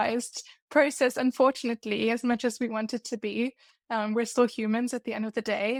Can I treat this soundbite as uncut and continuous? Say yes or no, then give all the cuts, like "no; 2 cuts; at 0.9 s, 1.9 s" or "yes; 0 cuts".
yes; 0 cuts